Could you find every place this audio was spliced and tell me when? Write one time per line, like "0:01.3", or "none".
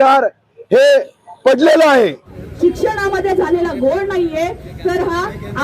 0:02.2